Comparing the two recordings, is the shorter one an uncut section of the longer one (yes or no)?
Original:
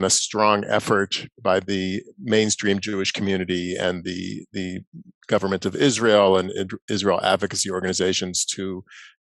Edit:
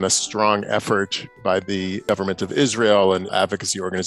no